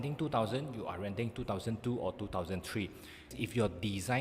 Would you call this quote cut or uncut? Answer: cut